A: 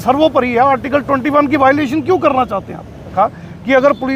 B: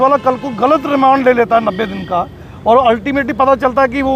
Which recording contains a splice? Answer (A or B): A